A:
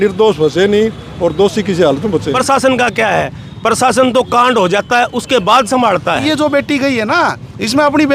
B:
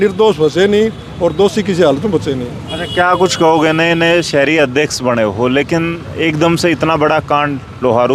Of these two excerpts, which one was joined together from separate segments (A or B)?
A